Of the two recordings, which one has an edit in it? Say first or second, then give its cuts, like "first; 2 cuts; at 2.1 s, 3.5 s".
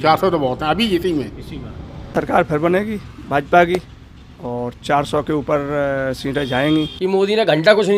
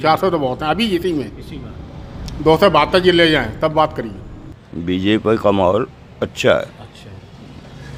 first; 2 cuts; at 2.1 s, 7.0 s